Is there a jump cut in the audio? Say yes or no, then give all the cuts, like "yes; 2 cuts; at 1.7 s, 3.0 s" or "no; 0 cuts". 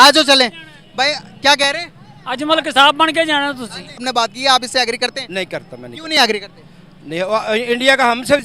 yes; 1 cut; at 4.1 s